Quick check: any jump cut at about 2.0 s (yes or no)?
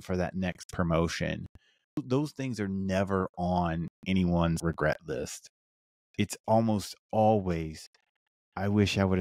yes